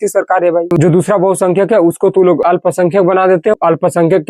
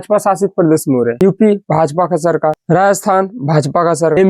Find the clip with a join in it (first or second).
first